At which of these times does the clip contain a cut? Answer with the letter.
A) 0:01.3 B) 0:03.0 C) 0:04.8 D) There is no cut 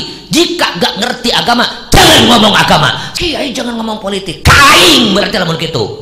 B